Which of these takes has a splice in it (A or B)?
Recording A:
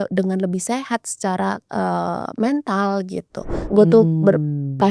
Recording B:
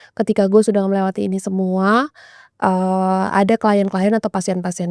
A